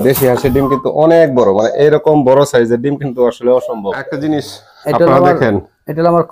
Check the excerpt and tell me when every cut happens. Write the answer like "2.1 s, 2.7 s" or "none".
4.1 s